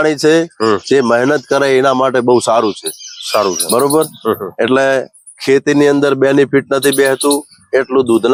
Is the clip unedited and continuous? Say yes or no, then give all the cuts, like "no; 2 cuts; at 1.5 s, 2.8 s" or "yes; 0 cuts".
yes; 0 cuts